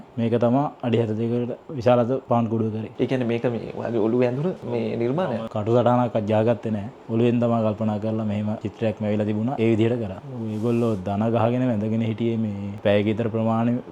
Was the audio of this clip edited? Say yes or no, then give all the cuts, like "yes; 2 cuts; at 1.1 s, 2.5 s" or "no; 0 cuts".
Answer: yes; 2 cuts; at 2.9 s, 10.2 s